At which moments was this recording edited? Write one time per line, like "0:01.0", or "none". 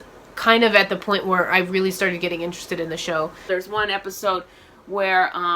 0:03.4